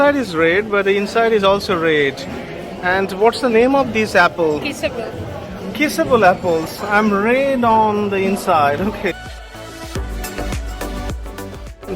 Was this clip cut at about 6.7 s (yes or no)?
no